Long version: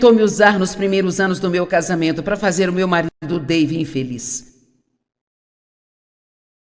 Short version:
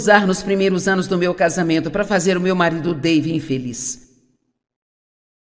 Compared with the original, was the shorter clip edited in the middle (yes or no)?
yes